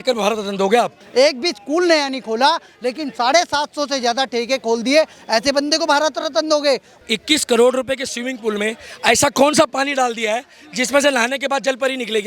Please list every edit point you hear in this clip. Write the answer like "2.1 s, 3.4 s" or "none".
1.0 s, 7.0 s